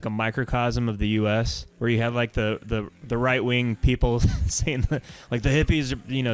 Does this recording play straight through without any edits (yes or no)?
no